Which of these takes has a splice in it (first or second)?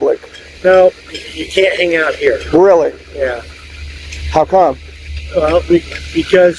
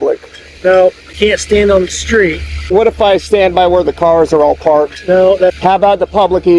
second